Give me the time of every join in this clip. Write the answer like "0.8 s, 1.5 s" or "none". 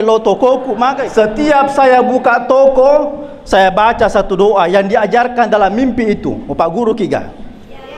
1.0 s